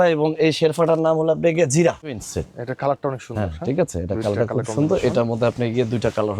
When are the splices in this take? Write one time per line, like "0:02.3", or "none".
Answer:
0:02.2